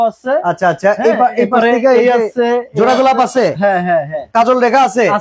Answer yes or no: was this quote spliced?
yes